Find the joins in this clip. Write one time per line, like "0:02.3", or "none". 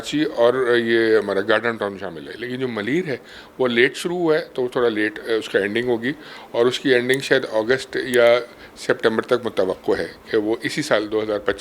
none